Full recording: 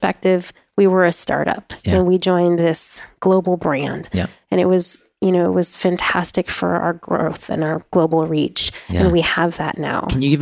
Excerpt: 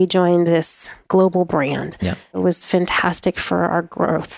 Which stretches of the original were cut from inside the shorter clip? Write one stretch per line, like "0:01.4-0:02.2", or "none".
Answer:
0:04.5-0:05.5